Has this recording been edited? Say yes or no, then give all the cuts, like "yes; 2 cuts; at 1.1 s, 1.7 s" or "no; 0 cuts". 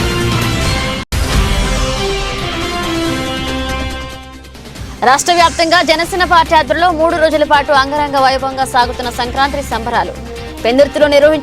no; 0 cuts